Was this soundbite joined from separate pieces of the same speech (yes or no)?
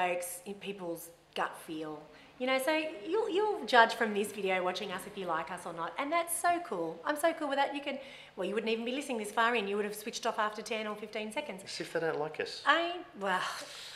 no